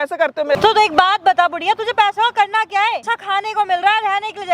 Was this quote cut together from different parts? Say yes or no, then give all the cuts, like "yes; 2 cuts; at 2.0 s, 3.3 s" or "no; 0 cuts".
yes; 1 cut; at 3.1 s